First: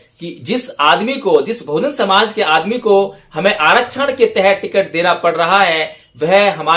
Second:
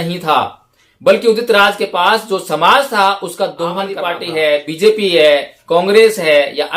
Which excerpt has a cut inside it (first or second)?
second